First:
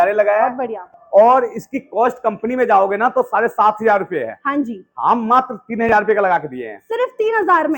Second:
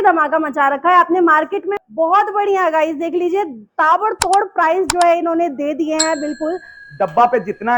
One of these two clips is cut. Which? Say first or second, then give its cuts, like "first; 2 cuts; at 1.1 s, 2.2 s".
second; 2 cuts; at 1.7 s, 6.8 s